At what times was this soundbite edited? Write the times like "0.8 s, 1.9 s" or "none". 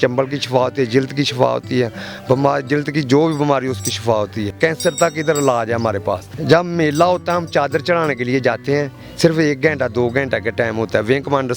4.5 s, 6.3 s